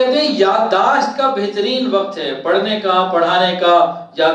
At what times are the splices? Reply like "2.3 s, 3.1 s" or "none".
none